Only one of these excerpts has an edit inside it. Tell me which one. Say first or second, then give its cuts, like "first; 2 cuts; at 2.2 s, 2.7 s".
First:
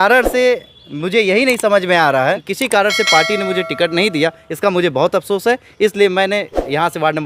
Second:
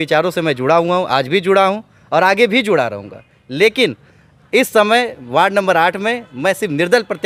first; 1 cut; at 2.5 s